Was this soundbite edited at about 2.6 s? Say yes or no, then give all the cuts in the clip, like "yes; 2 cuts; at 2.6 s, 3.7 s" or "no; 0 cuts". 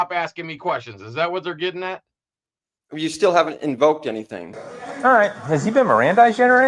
no; 1 cut; at 4.7 s